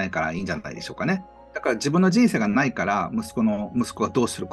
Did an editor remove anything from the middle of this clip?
yes; 1 cut; at 1.4 s

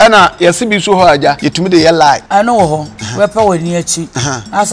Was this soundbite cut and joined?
yes; 3 cuts; at 1.5 s, 2.2 s, 3.0 s

